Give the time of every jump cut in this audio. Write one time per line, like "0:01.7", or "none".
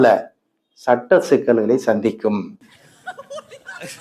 0:02.5